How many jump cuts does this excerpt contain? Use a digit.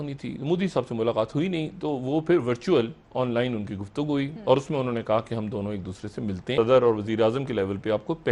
1